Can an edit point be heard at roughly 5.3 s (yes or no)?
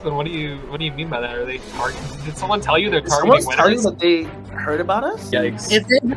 yes